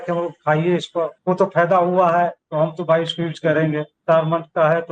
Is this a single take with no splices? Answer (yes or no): no